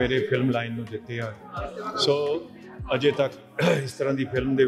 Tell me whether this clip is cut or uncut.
uncut